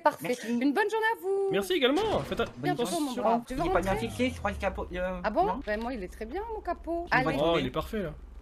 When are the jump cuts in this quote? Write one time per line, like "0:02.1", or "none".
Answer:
0:03.5
0:07.0